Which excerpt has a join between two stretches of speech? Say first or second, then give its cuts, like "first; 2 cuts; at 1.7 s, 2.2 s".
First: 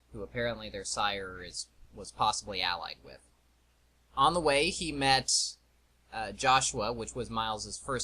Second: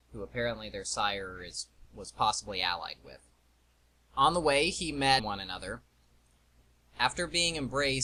first; 1 cut; at 5.2 s